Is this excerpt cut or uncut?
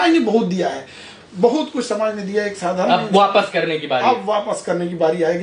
uncut